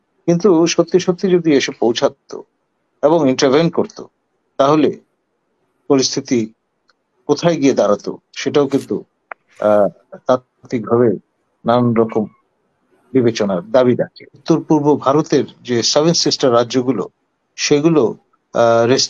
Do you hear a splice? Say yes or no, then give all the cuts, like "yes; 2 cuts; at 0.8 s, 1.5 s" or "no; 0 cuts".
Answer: yes; 1 cut; at 14.3 s